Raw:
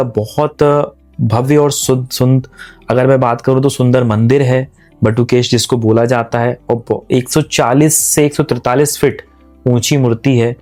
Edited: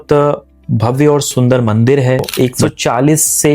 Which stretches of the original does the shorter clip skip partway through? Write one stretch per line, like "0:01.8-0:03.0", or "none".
0:01.8-0:03.7
0:04.7-0:07.0